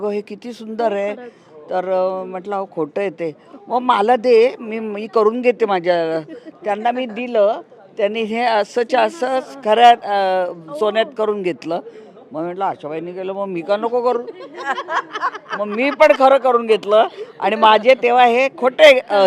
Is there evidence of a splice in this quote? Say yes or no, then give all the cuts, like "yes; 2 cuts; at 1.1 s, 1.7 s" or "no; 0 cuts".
no; 0 cuts